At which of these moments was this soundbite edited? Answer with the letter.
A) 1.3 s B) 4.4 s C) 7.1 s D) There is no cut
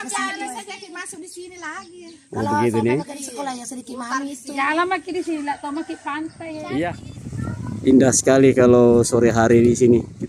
C